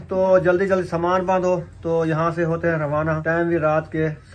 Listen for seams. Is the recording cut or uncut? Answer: cut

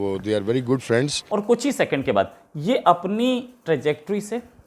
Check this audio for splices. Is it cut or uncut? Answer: cut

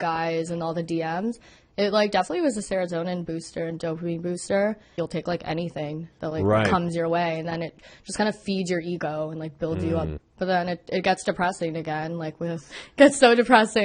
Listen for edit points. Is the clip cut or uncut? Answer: cut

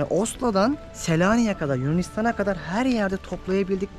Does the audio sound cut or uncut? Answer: cut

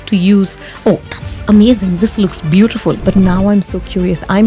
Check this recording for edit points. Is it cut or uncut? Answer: cut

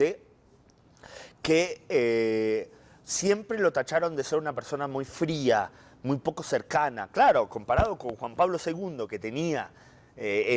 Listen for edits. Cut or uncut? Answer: uncut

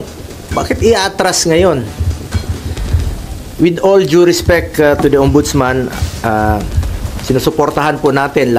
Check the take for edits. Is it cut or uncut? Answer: uncut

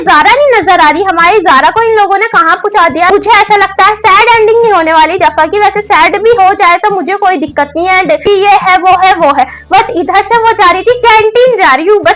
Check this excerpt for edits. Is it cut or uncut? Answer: cut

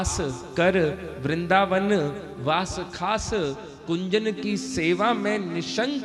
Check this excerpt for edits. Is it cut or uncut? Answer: uncut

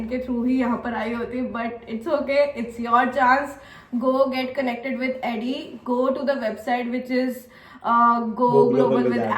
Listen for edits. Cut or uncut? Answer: uncut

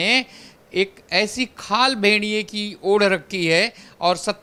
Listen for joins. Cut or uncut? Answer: uncut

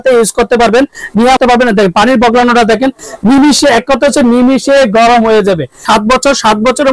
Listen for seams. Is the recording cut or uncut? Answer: cut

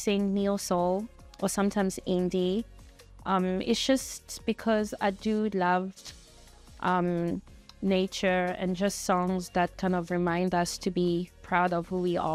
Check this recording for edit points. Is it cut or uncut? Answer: uncut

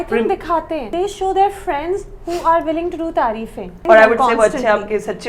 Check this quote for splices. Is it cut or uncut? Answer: cut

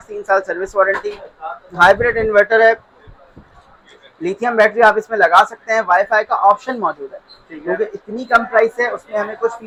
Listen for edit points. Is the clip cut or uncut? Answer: uncut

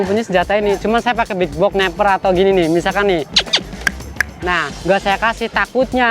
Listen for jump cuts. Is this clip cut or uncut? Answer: cut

